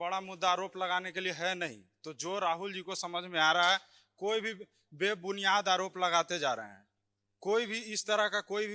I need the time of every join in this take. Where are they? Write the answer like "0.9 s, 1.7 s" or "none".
none